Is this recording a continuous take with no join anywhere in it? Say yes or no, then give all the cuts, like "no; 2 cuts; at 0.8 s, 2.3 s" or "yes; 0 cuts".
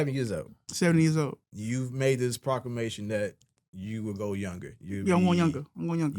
no; 1 cut; at 1.5 s